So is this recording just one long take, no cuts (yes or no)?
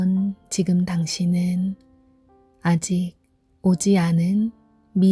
yes